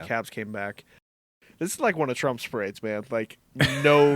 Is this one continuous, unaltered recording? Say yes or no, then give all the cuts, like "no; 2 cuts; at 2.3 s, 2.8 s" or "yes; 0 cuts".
no; 1 cut; at 1.2 s